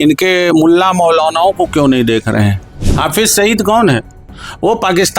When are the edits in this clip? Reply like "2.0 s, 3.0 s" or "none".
2.8 s